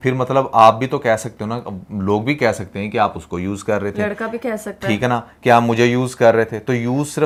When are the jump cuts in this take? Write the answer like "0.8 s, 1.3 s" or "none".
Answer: none